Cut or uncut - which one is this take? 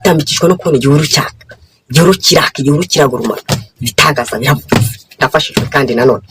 uncut